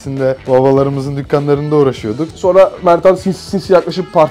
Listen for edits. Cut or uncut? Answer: cut